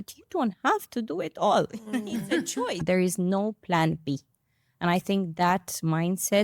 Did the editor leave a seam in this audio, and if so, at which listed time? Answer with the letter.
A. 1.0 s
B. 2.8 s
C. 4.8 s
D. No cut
B